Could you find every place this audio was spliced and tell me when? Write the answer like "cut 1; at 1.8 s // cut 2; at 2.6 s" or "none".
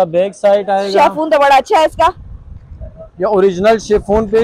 none